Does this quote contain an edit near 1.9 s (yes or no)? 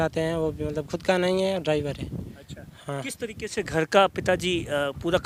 no